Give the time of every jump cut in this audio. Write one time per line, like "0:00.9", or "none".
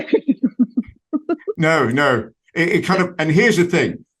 0:01.5